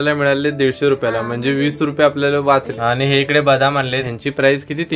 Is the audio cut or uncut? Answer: cut